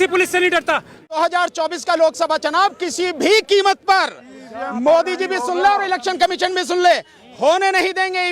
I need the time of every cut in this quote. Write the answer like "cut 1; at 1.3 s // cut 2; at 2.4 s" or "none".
cut 1; at 1.2 s